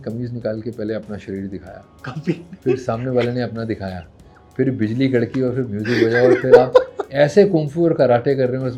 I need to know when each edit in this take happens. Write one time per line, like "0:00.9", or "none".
none